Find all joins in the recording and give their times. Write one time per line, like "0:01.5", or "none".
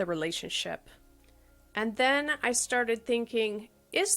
0:01.0